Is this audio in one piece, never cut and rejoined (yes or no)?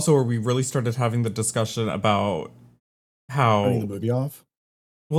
yes